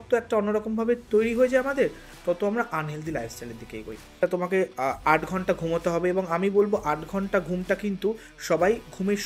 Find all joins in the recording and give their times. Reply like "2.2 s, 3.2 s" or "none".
4.1 s

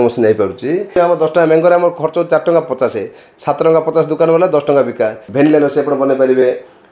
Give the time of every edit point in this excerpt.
0.9 s, 5.2 s

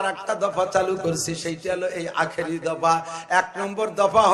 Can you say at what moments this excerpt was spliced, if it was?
none

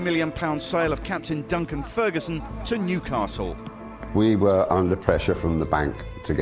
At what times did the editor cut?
3.7 s

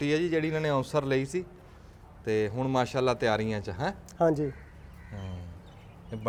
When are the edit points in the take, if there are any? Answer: none

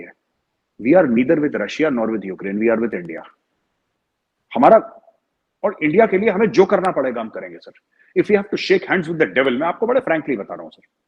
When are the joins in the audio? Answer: none

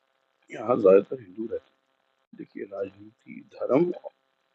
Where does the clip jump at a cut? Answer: 2.4 s

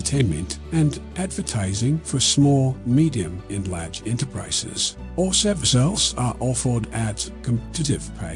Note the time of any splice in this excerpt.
none

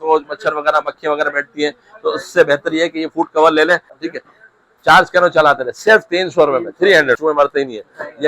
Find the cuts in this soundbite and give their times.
3.9 s, 7.2 s

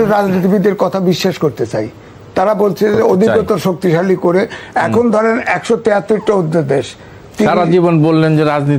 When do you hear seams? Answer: none

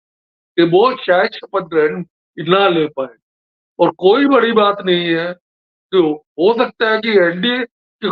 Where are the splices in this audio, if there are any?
none

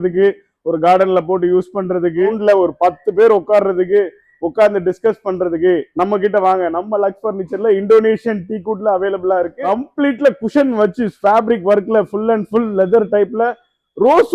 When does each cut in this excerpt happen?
2.4 s, 9.6 s

